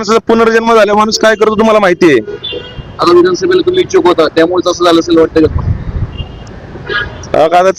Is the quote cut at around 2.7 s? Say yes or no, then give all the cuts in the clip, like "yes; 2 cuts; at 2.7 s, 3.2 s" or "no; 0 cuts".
no; 0 cuts